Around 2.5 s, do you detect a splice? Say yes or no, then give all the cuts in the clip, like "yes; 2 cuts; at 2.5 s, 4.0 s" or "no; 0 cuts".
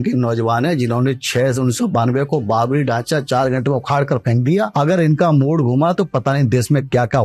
no; 1 cut; at 4.7 s